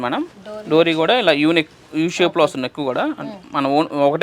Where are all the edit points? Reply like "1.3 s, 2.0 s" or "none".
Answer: none